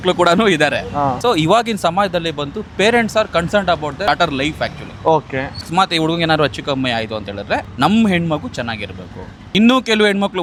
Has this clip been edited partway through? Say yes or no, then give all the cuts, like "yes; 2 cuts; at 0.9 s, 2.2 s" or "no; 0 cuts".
no; 0 cuts